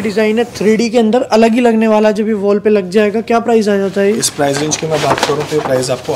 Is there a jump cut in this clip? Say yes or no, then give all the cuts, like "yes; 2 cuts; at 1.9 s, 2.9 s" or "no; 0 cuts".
no; 0 cuts